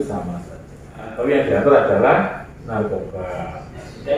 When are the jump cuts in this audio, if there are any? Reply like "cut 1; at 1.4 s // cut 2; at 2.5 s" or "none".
cut 1; at 1.2 s